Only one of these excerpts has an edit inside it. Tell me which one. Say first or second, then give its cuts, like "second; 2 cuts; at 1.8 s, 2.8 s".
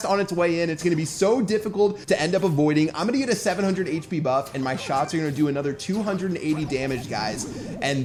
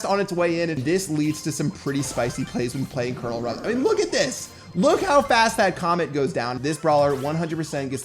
second; 2 cuts; at 0.8 s, 6.6 s